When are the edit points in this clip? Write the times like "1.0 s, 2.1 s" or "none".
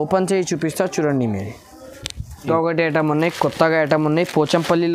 2.5 s